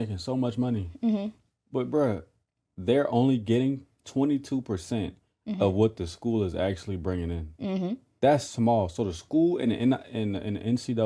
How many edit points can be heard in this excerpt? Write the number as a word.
one